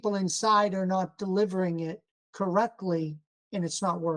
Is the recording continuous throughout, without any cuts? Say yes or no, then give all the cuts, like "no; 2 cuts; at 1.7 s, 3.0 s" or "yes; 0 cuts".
yes; 0 cuts